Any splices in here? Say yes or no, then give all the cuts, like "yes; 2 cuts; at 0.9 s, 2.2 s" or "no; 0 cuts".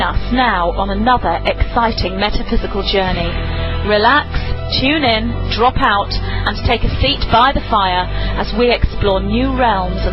no; 0 cuts